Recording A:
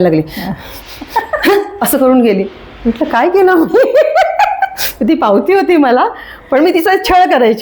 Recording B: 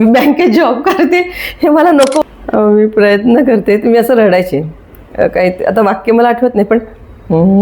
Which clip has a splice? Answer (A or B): B